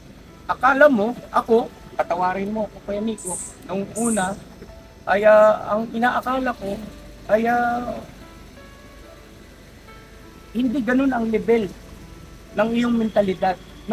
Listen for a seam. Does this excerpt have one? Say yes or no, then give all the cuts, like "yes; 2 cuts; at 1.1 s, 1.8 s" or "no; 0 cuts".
no; 0 cuts